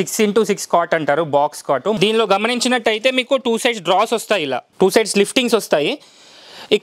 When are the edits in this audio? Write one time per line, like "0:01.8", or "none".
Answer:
0:02.0
0:04.7